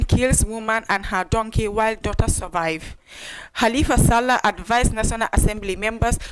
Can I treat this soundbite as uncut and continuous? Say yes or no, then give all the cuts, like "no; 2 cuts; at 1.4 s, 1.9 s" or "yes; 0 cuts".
yes; 0 cuts